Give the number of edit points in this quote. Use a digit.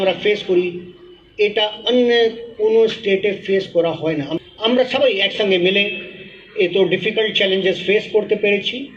1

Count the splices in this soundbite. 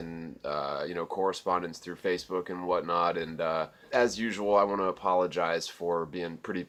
0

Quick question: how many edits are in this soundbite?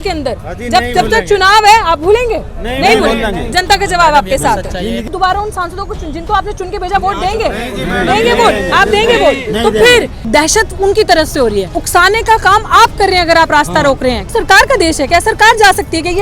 4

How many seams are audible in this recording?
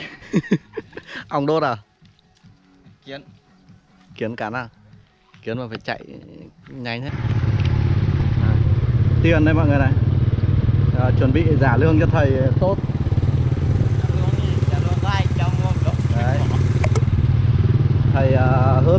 1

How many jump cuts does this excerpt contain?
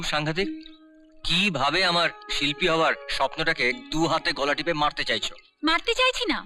0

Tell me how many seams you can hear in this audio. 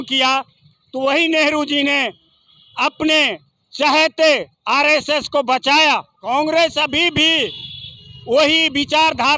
1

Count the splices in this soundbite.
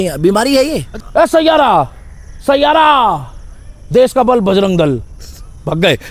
1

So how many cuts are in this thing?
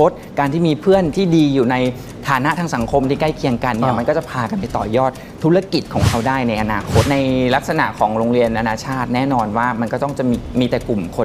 1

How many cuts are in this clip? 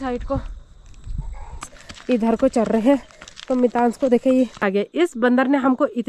2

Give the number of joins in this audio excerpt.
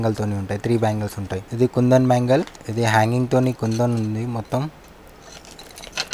2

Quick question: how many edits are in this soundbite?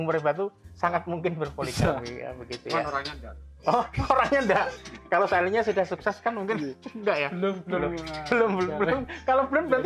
0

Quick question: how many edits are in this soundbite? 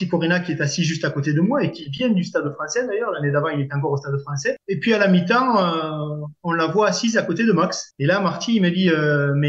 1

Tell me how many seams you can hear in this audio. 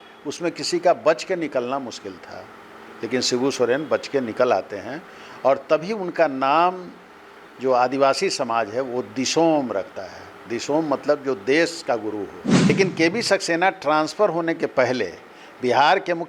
1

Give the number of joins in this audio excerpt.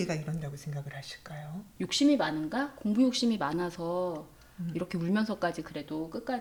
0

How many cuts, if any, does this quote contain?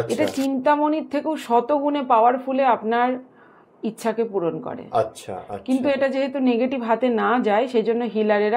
0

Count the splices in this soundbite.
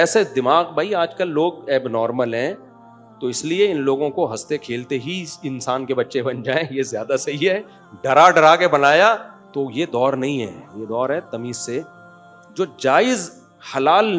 1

